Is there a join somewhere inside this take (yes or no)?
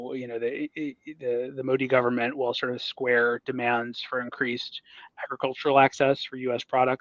no